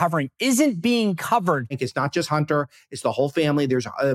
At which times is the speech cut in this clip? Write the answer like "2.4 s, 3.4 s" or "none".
1.8 s